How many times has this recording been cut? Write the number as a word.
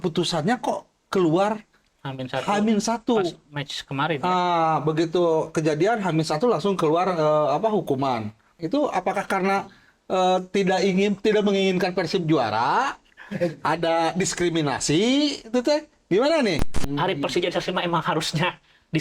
two